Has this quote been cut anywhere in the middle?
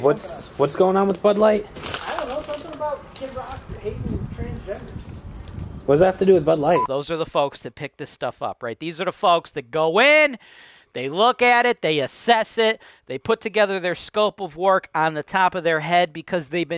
yes; 1 cut; at 6.9 s

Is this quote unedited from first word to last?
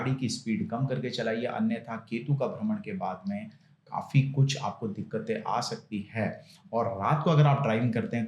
yes; 0 cuts

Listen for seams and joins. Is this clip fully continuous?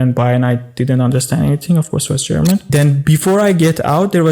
no; 1 cut; at 2.7 s

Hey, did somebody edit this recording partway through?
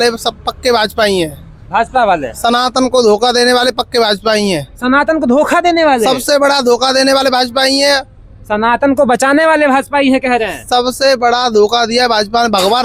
no; 0 cuts

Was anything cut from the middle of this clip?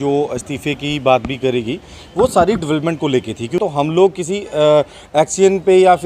yes; 1 cut; at 3.6 s

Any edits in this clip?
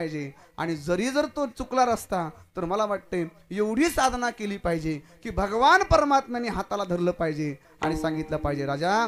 no; 0 cuts

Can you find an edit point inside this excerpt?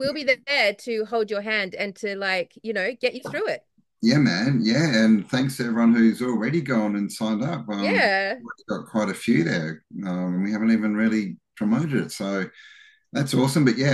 no; 0 cuts

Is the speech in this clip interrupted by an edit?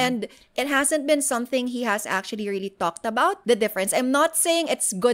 yes; 1 cut; at 3.4 s

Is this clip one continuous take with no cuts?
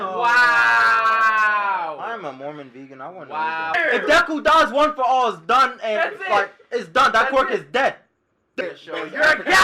no; 2 cuts; at 3.7 s, 8.6 s

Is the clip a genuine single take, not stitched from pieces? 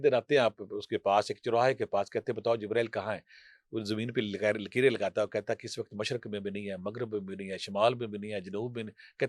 yes; 0 cuts

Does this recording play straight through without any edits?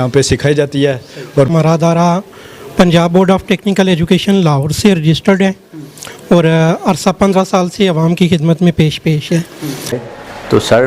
no; 2 cuts; at 1.5 s, 10.0 s

